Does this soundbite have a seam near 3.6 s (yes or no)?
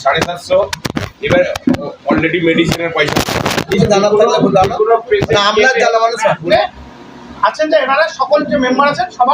yes